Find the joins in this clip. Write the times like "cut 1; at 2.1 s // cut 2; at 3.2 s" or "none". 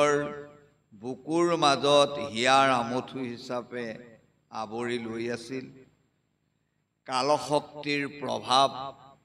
none